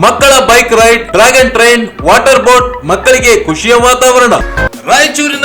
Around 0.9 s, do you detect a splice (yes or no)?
no